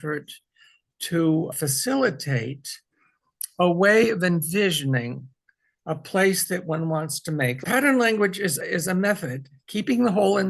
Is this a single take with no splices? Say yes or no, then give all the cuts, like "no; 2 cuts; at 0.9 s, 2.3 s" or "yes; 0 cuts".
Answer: no; 1 cut; at 7.6 s